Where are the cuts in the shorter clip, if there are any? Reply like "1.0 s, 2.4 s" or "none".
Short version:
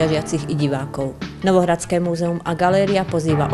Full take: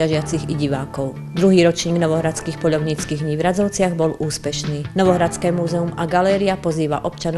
1.2 s